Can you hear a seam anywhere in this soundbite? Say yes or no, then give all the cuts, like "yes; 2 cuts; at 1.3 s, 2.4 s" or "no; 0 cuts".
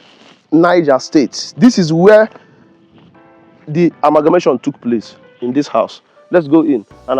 yes; 1 cut; at 1.5 s